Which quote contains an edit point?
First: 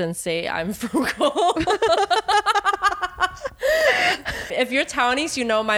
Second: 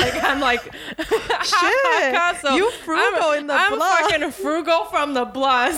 first; 1 cut; at 4.5 s

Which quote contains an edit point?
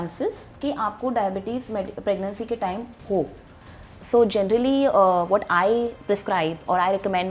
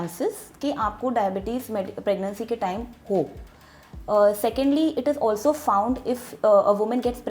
first; 1 cut; at 3.9 s

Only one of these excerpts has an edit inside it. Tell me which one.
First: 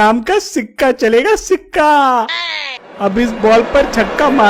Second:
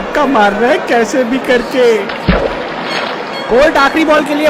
first; 1 cut; at 2.7 s

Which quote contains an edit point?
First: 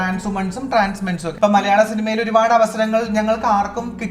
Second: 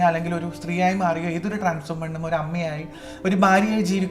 first; 1 cut; at 1.3 s

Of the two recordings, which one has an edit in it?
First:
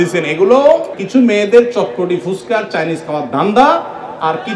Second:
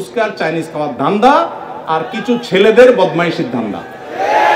first; 1 cut; at 0.9 s

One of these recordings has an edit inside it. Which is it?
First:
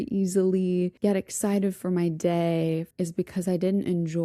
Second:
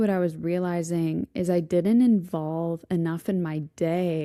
first; 2 cuts; at 0.9 s, 2.9 s

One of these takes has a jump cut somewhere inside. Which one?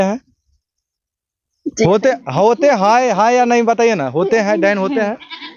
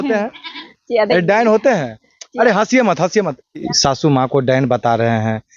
second; 1 cut; at 3.7 s

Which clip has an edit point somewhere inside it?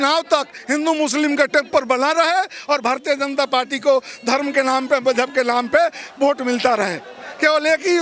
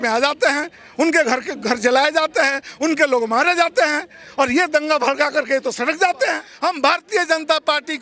second; 1 cut; at 6.5 s

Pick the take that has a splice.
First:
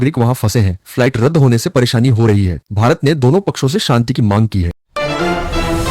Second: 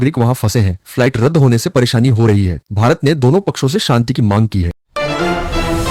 first; 1 cut; at 4.8 s

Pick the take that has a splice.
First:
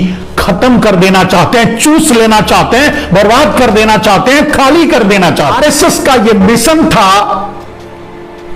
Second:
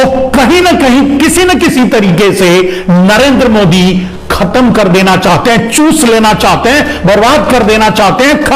first; 1 cut; at 5.5 s

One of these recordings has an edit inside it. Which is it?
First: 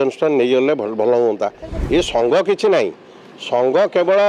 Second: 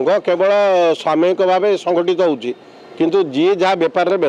first; 1 cut; at 1.7 s

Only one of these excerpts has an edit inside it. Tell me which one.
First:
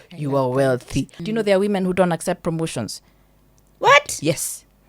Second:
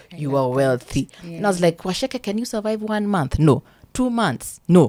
first; 1 cut; at 1.2 s

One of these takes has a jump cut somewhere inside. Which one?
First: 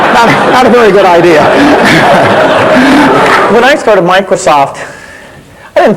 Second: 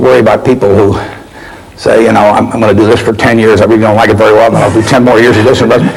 first; 1 cut; at 3.5 s

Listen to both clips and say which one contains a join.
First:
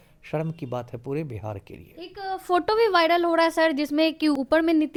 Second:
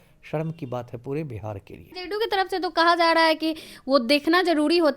second; 1 cut; at 1.9 s

